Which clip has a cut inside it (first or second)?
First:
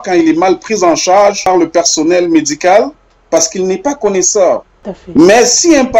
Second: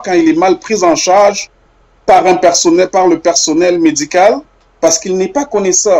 first